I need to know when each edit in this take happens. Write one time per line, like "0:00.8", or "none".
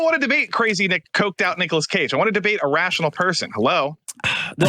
0:01.1

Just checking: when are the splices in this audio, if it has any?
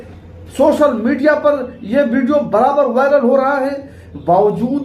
0:03.5

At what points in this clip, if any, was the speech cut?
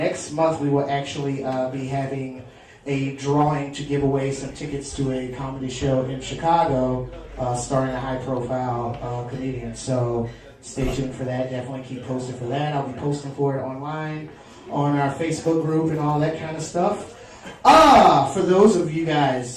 0:16.2

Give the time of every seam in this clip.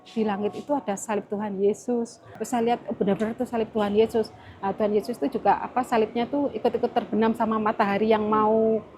0:02.3

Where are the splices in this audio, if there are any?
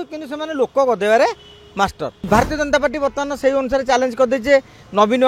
0:02.3

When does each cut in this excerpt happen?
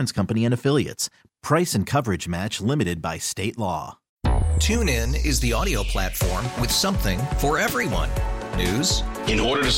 0:04.0

